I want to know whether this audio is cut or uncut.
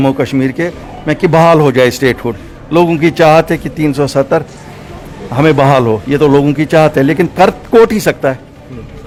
uncut